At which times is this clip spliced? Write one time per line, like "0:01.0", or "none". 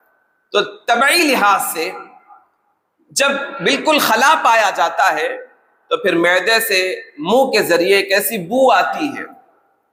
none